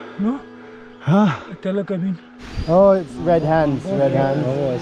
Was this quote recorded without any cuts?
no; 1 cut; at 2.3 s

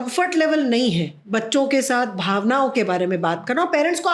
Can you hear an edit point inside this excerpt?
yes; 1 cut; at 1.2 s

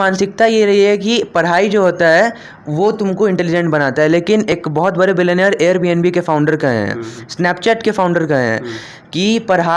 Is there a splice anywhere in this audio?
no; 0 cuts

